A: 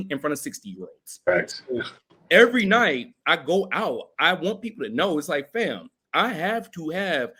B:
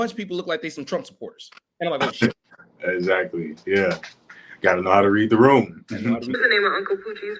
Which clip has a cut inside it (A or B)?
B